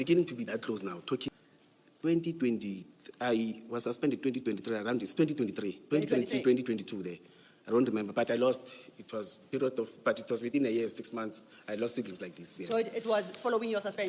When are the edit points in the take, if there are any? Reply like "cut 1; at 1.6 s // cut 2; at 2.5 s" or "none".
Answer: cut 1; at 1.3 s